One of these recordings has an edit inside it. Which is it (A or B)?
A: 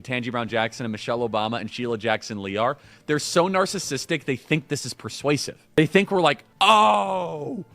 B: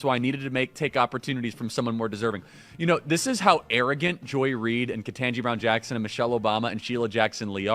A